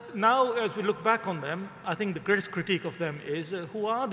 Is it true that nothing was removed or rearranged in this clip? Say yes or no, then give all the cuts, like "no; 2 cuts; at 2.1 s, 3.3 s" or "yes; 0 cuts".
yes; 0 cuts